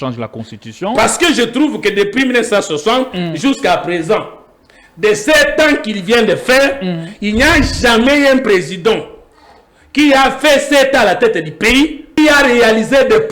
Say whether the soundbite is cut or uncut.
cut